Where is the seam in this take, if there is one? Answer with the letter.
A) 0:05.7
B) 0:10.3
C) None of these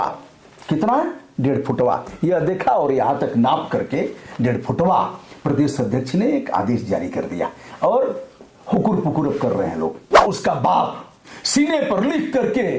B